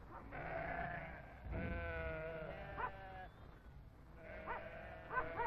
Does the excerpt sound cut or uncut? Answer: cut